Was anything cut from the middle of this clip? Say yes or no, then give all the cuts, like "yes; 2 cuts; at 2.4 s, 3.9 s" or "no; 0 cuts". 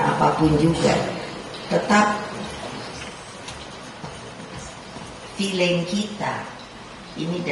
no; 0 cuts